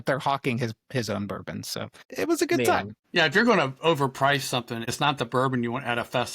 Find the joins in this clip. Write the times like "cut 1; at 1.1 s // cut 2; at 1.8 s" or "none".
cut 1; at 2.0 s // cut 2; at 3.0 s // cut 3; at 4.9 s